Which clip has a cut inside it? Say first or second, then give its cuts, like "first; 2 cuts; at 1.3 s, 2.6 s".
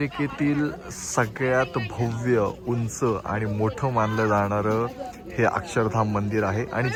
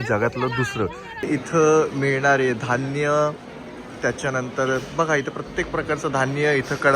second; 1 cut; at 1.3 s